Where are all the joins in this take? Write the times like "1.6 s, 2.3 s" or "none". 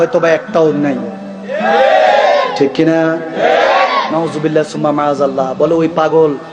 4.1 s